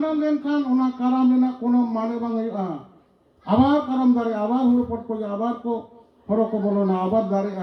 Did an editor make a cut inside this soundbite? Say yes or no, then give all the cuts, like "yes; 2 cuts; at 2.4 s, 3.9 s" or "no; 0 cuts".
no; 0 cuts